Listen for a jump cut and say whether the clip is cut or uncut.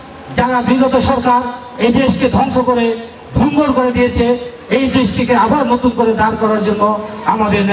uncut